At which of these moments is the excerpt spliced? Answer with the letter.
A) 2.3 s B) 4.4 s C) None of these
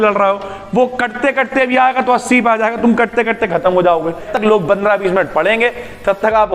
B